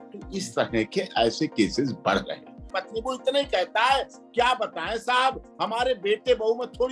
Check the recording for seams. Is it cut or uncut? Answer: cut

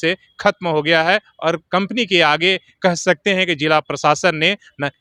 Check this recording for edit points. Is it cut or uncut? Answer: uncut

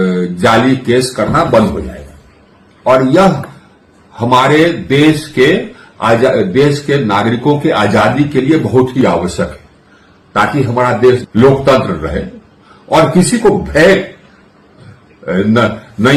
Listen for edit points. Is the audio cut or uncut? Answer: uncut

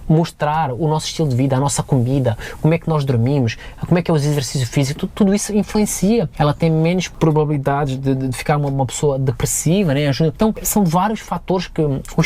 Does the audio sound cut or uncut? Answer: cut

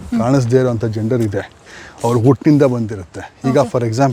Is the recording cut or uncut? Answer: uncut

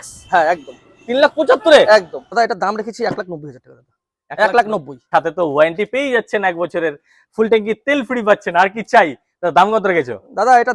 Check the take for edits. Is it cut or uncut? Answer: cut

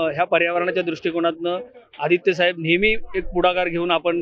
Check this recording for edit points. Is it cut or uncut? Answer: uncut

